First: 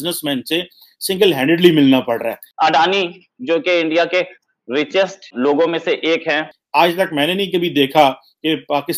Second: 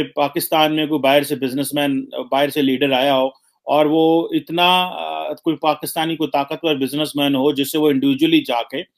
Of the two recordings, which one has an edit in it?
first; 3 cuts; at 2.4 s, 5.3 s, 6.6 s

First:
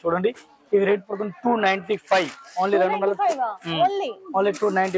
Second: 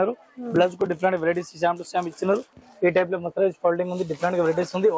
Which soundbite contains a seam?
second; 1 cut; at 2.6 s

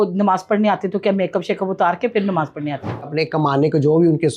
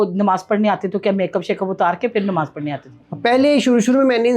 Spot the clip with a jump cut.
first; 1 cut; at 3.1 s

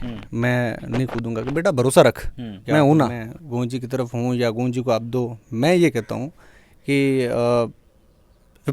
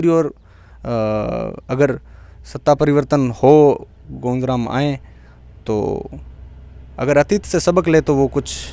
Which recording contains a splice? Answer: first; 1 cut; at 3.3 s

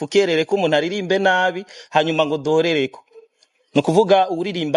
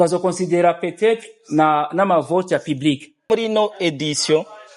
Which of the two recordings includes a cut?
second; 1 cut; at 3.3 s

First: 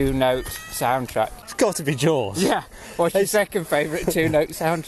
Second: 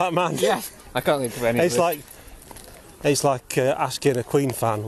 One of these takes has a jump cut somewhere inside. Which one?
first; 1 cut; at 1.4 s

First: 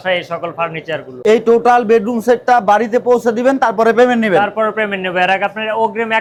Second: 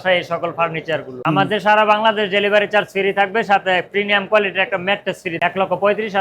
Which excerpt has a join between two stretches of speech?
second; 2 cuts; at 1.2 s, 5.4 s

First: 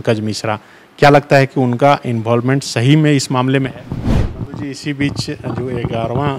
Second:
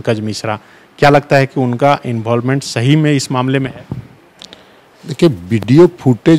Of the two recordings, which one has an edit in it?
first; 1 cut; at 4.3 s

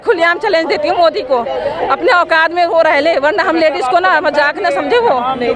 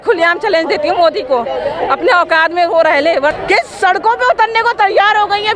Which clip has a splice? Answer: second; 1 cut; at 3.3 s

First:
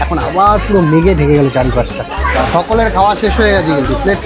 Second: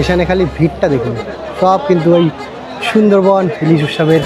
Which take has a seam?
first; 1 cut; at 2.3 s

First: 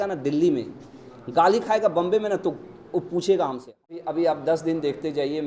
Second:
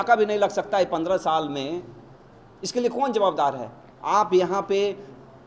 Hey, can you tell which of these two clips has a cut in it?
first; 1 cut; at 4.0 s

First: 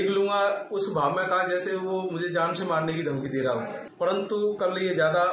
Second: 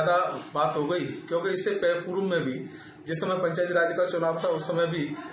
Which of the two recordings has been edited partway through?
first; 1 cut; at 3.8 s

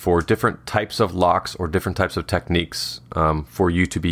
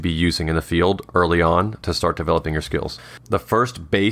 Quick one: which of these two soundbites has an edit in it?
second; 1 cut; at 3.1 s

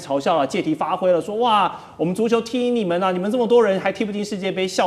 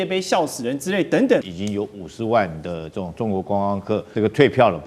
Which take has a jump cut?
second; 2 cuts; at 1.5 s, 4.1 s

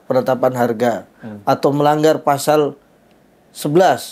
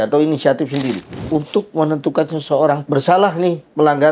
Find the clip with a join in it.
second; 2 cuts; at 1.1 s, 2.8 s

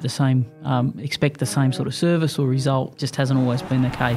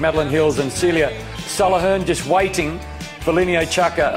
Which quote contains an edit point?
first; 1 cut; at 3.0 s

